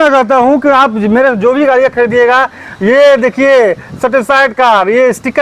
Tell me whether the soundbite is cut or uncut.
uncut